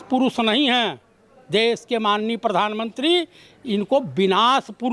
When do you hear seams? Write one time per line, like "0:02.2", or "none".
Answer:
none